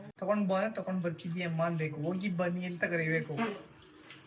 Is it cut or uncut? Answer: uncut